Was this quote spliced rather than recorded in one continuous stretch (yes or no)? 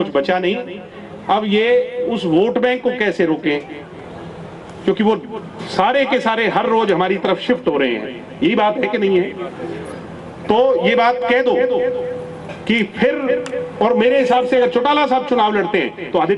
no